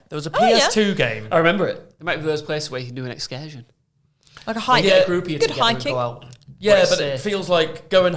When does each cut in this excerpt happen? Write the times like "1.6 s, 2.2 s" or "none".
1.9 s